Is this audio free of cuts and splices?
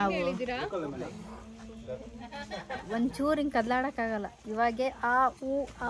yes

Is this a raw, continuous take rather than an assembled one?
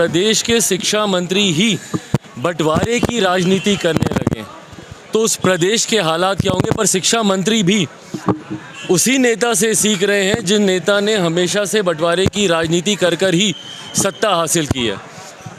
yes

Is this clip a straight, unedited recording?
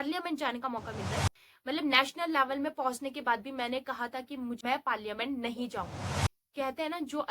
no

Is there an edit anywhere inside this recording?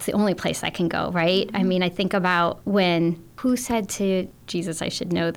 yes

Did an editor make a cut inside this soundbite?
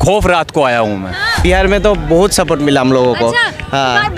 yes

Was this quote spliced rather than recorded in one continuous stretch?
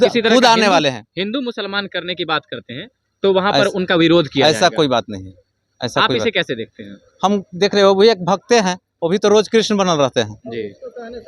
no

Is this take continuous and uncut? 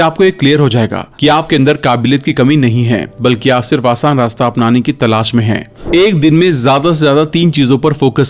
no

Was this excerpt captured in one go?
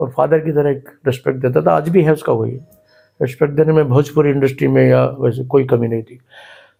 yes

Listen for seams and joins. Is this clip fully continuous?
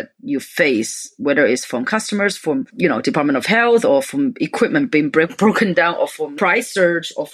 no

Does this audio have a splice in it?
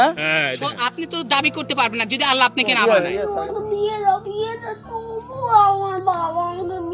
yes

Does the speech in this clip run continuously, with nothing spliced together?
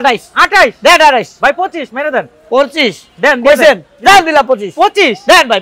yes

